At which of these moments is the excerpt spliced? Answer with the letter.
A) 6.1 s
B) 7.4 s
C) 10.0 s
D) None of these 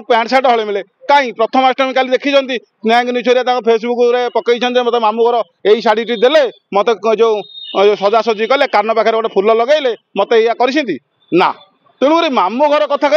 D